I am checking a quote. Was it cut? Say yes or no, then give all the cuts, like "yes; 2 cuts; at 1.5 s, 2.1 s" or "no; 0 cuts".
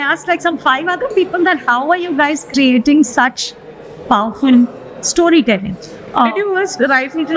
no; 0 cuts